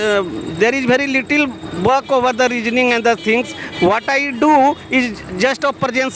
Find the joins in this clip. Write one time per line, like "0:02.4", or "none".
none